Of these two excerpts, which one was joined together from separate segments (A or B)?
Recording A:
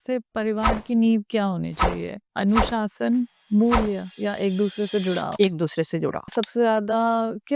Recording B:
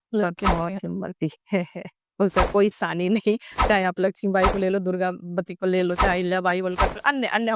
A